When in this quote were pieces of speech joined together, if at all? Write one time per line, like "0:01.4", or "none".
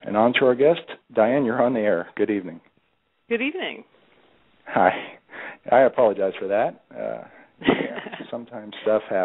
0:07.9